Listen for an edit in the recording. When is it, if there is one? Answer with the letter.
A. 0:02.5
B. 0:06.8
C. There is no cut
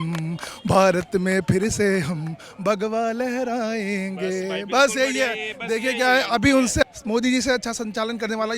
B